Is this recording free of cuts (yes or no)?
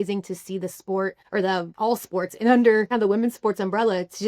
no